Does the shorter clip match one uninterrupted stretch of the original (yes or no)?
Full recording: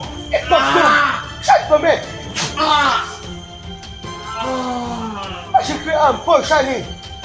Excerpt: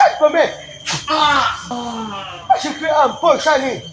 no